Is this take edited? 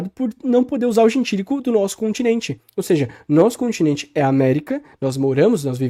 no; 0 cuts

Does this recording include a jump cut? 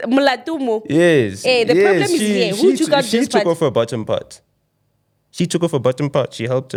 no; 0 cuts

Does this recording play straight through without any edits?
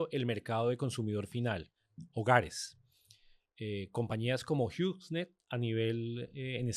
yes; 0 cuts

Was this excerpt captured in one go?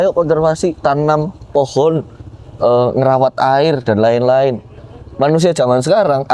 yes; 0 cuts

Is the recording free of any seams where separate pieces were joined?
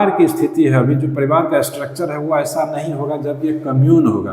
yes; 0 cuts

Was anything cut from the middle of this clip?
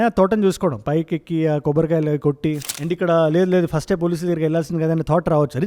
yes; 1 cut; at 2.7 s

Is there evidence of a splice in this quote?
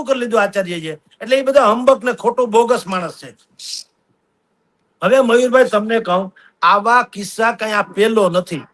no; 0 cuts

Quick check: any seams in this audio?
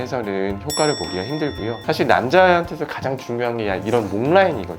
yes; 1 cut; at 1.8 s

